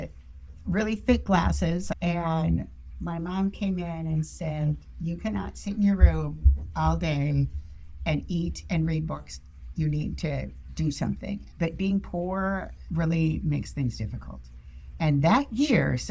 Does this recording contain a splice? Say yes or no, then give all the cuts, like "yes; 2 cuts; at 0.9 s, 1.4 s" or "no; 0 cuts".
yes; 3 cuts; at 1.9 s, 11.5 s, 12.8 s